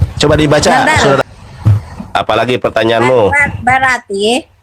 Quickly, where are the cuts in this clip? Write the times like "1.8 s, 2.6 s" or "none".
1.2 s